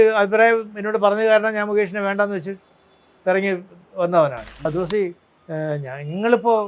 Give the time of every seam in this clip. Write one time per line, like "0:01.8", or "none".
0:04.7

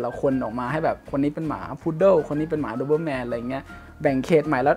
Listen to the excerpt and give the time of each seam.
none

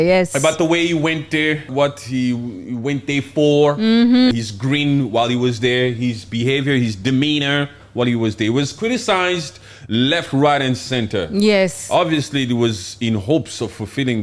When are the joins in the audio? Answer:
0:01.7
0:04.3

